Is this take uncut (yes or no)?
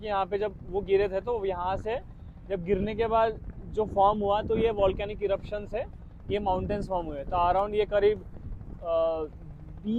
yes